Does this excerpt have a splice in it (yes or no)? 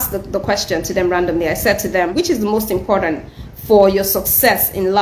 yes